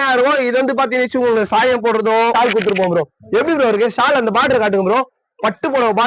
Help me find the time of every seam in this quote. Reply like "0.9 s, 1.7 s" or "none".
2.3 s